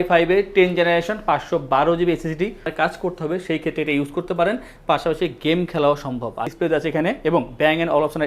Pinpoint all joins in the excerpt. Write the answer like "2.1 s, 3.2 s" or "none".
2.7 s, 6.5 s